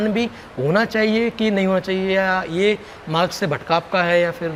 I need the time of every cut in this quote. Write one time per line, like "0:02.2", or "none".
none